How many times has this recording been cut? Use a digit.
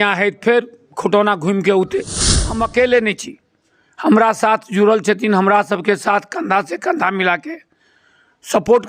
1